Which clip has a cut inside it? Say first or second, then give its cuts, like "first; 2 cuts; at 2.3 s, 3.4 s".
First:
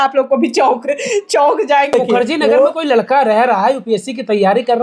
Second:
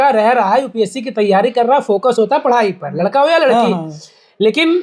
first; 1 cut; at 1.9 s